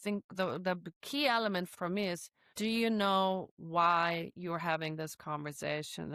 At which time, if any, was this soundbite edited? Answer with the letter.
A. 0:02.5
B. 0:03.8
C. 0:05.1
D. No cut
D